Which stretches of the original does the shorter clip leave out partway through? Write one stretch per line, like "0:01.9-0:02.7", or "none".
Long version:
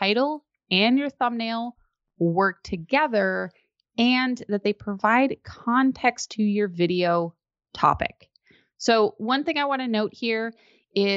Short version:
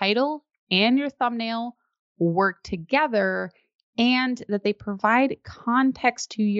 none